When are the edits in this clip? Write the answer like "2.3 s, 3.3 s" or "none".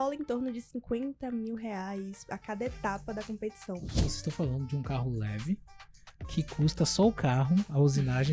4.0 s